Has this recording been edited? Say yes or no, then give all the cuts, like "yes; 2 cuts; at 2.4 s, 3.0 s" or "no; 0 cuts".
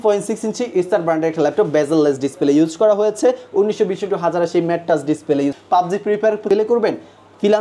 yes; 2 cuts; at 5.6 s, 6.5 s